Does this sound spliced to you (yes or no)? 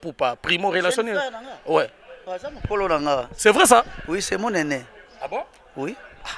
no